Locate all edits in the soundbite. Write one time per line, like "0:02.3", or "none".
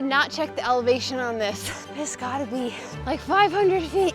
0:01.8
0:02.9